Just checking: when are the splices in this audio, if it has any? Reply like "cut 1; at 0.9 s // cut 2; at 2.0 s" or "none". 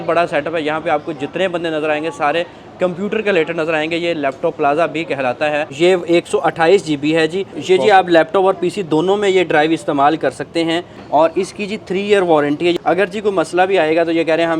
cut 1; at 5.7 s // cut 2; at 7.5 s // cut 3; at 10.9 s // cut 4; at 12.8 s